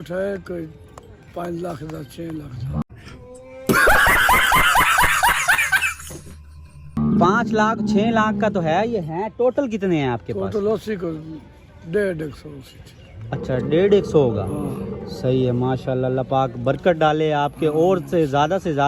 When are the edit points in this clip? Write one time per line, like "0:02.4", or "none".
none